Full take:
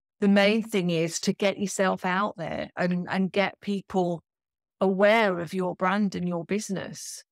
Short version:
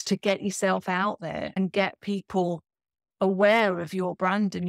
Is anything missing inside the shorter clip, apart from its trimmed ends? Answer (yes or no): yes